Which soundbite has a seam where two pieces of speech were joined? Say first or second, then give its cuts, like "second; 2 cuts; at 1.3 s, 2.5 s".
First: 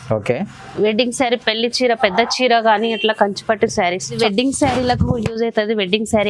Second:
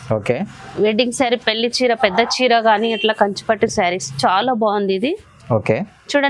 first; 1 cut; at 4.1 s